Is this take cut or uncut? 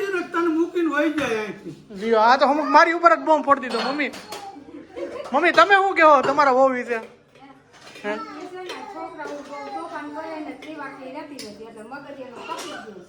uncut